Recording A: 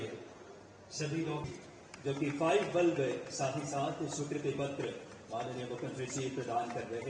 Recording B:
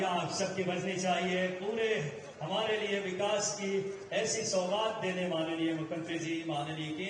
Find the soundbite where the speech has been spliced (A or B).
A